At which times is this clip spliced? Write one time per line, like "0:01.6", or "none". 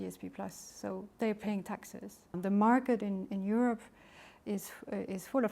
0:02.3